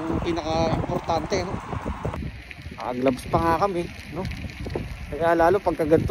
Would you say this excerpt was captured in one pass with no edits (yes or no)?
no